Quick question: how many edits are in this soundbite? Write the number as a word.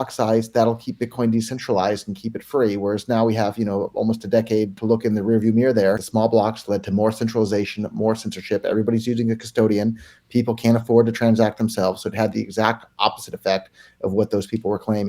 two